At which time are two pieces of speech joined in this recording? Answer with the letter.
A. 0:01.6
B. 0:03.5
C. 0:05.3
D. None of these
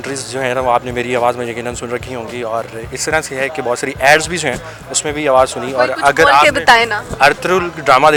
D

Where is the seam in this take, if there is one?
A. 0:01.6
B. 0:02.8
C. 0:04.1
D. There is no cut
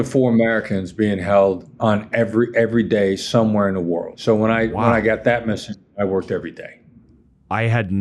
C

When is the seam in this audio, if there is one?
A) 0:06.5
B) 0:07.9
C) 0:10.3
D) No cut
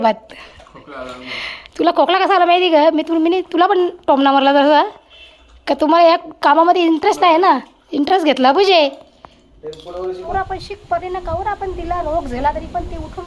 C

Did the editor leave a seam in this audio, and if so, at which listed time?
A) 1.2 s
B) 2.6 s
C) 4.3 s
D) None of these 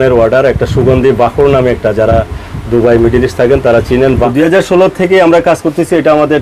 C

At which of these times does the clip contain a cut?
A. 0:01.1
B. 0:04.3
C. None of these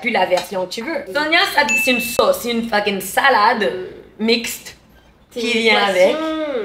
A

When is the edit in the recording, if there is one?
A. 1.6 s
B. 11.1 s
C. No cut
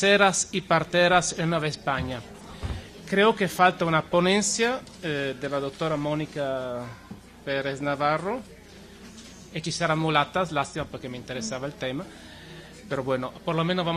C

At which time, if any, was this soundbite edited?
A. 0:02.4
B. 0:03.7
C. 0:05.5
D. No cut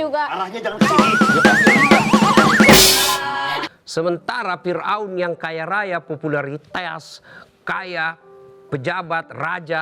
B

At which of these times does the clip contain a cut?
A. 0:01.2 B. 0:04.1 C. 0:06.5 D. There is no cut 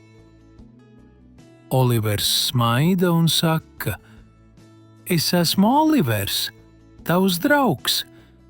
A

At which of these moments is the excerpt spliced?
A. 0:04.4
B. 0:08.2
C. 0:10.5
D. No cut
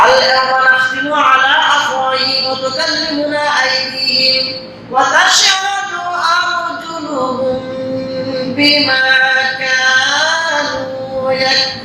D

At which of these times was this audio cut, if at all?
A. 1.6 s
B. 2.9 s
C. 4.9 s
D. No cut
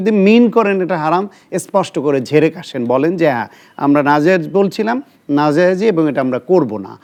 D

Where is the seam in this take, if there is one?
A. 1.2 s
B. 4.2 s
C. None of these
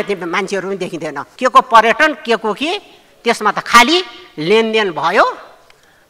A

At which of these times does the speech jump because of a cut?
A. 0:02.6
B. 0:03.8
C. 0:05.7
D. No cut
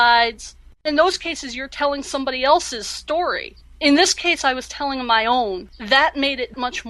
C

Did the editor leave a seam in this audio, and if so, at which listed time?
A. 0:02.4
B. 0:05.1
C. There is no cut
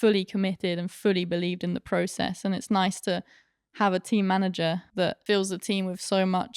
B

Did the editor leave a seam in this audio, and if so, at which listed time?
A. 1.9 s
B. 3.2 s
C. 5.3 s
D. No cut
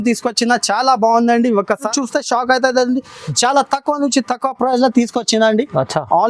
A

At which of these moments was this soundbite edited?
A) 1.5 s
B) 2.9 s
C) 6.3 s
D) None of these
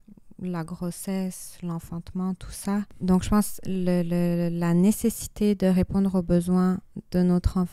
B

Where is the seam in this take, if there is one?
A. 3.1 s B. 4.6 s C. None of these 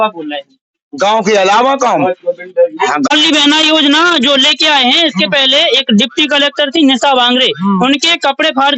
A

